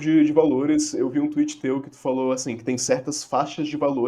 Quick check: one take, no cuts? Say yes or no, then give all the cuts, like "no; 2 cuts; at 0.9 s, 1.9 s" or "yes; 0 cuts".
yes; 0 cuts